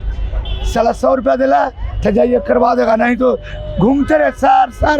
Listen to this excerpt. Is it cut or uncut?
uncut